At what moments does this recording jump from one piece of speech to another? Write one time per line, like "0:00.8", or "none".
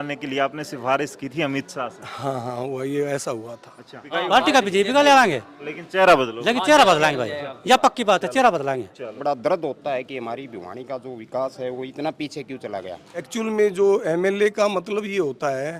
0:04.0
0:09.1
0:13.3